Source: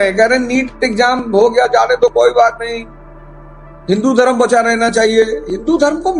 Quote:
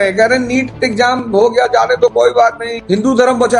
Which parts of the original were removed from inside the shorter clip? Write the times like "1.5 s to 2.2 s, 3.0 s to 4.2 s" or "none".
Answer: 2.7 s to 3.7 s